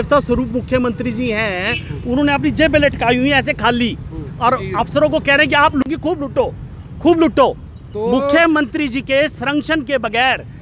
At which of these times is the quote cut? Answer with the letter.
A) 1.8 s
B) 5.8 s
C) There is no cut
B